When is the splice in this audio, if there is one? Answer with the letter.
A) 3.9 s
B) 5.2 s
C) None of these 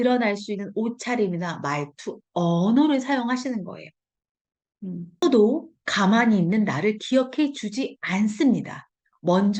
B